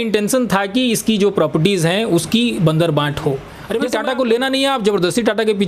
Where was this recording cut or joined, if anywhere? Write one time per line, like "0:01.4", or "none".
0:03.5